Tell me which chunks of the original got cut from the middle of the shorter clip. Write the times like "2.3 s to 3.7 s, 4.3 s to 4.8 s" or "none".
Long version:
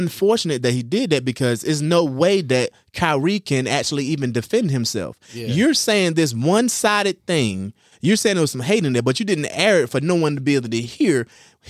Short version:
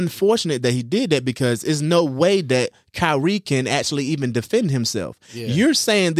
none